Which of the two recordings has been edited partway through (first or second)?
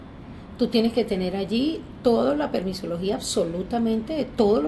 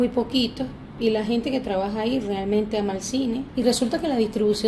second